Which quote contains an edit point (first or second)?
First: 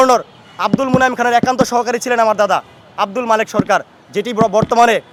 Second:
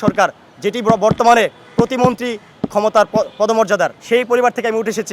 second